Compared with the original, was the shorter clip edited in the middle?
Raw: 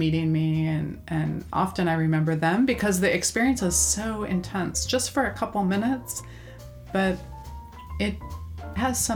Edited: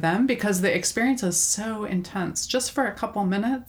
no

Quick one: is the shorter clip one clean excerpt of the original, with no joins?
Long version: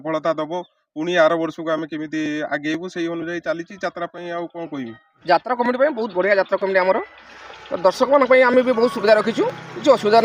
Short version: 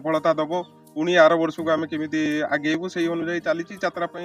yes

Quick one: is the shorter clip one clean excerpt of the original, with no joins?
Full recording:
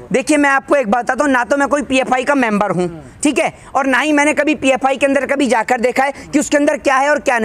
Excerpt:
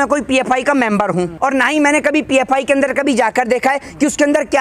no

